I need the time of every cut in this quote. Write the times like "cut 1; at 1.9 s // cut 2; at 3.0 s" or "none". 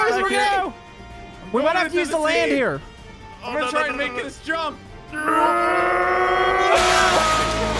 none